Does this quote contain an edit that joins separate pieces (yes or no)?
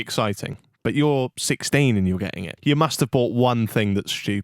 yes